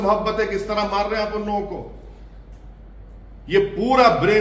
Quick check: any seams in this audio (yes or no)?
no